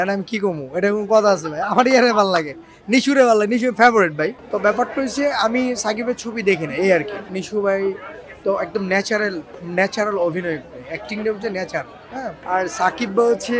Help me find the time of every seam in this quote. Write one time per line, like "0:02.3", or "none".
0:04.4
0:07.3
0:12.4